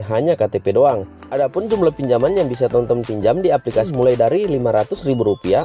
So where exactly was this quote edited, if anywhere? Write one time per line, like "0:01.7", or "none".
0:01.2
0:03.9